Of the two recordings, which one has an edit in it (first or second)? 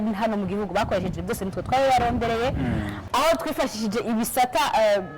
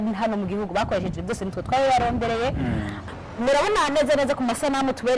second